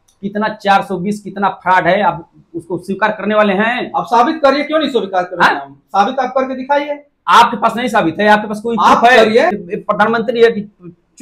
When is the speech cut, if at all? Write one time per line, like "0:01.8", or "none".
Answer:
0:09.5